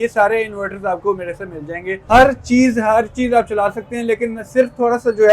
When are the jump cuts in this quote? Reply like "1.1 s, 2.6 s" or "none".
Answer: 1.9 s